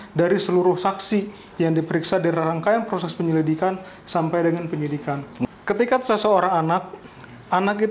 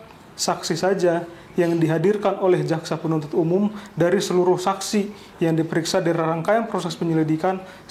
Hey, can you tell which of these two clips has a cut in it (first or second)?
first